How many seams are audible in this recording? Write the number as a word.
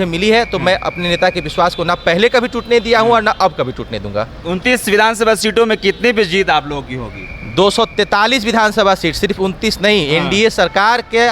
zero